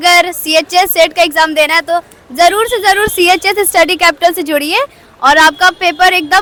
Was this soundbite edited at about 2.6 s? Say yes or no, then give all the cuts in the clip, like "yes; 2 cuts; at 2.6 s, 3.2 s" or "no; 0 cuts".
no; 0 cuts